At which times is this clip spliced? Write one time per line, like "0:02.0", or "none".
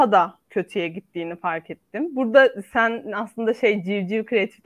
none